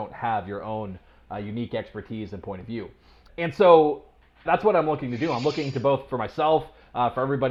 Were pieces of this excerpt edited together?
no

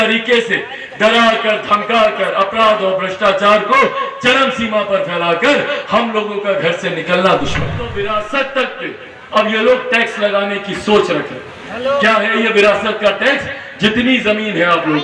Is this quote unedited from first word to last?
no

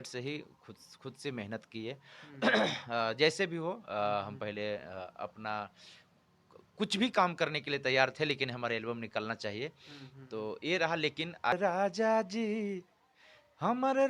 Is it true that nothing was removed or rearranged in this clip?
no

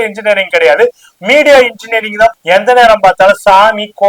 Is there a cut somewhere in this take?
yes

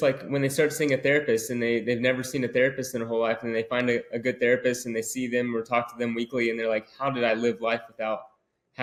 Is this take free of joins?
yes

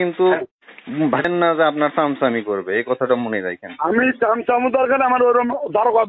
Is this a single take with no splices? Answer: no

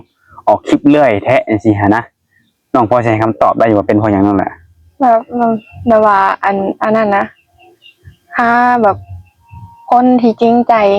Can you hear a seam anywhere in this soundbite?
no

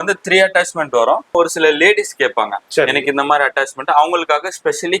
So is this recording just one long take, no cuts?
no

